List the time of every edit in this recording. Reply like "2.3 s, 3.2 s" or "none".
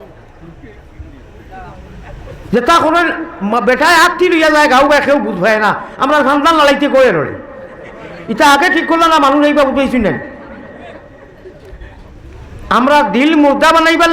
12.2 s